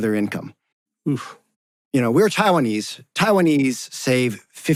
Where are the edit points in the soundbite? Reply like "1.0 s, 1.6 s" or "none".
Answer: none